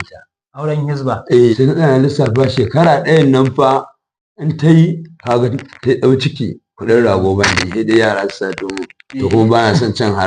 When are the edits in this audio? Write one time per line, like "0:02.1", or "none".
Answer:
0:01.5